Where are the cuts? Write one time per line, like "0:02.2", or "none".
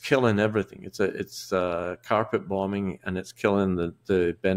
none

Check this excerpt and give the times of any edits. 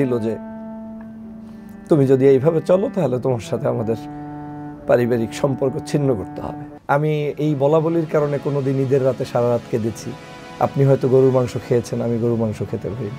0:06.7

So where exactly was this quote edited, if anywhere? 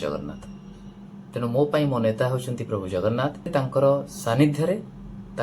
0:03.5

